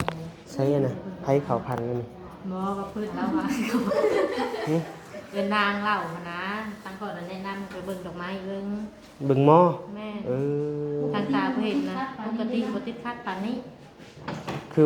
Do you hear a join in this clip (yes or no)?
no